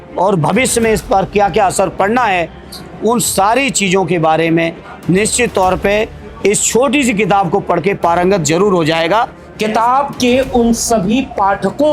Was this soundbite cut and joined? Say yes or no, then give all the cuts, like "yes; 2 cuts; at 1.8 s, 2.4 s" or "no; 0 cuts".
yes; 1 cut; at 9.4 s